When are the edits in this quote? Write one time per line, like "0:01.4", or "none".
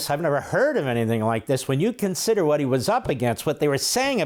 none